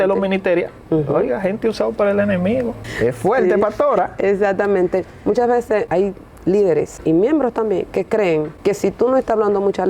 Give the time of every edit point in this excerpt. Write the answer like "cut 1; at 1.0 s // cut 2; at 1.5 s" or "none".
cut 1; at 2.8 s // cut 2; at 5.9 s // cut 3; at 6.9 s // cut 4; at 8.5 s